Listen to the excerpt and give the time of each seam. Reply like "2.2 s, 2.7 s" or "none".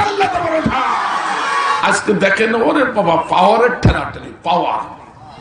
1.8 s